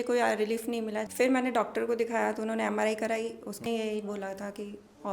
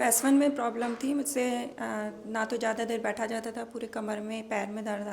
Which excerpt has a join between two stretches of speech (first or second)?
first